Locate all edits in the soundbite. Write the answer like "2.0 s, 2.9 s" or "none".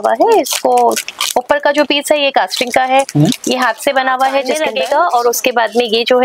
4.6 s

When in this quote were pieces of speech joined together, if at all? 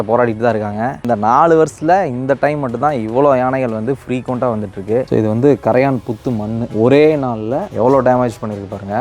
1.0 s, 5.1 s

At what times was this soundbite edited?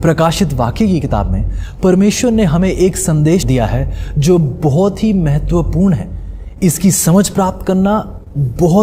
3.5 s

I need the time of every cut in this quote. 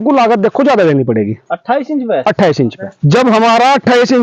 2.9 s

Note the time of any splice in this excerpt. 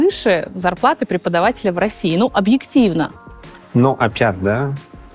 none

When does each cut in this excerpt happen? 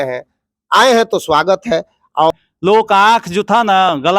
2.3 s

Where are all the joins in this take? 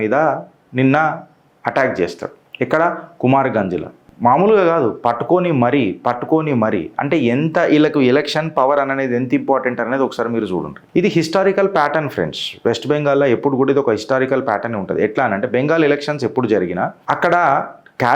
none

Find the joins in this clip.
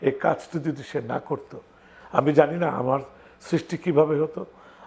none

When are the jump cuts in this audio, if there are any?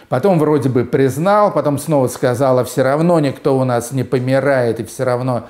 none

